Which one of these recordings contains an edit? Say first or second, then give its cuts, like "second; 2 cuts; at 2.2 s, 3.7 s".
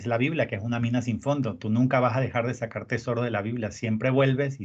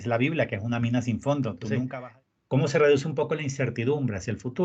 second; 1 cut; at 1.9 s